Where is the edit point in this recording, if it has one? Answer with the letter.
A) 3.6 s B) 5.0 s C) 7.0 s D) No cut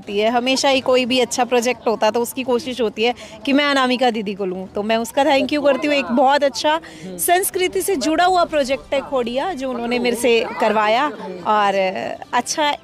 D